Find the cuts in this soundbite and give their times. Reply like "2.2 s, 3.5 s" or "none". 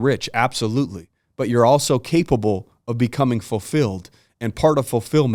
none

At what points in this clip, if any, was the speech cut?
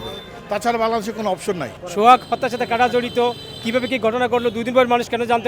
1.8 s

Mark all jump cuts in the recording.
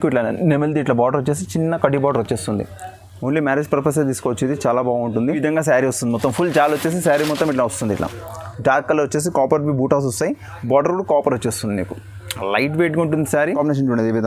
5.4 s, 13.6 s

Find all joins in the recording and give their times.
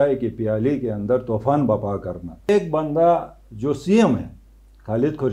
2.4 s

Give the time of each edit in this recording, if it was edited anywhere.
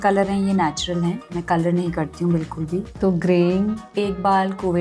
1.3 s, 2.9 s, 3.9 s

